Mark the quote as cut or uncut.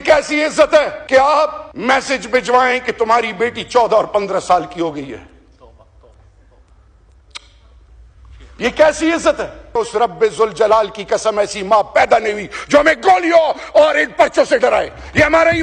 cut